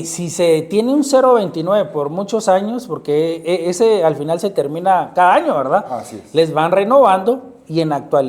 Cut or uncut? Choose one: uncut